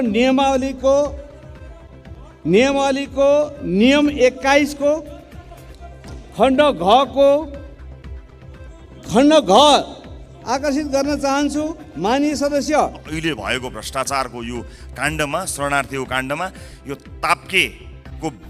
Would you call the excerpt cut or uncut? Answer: cut